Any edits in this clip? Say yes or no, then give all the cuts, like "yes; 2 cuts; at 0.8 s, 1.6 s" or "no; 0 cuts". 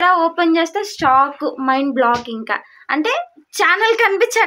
no; 0 cuts